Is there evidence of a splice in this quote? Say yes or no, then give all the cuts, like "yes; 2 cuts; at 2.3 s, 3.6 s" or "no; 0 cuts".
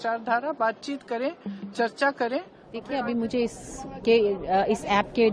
yes; 1 cut; at 2.8 s